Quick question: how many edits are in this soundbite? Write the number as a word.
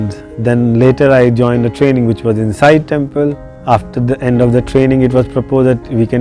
zero